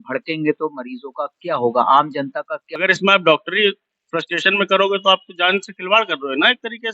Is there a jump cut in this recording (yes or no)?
yes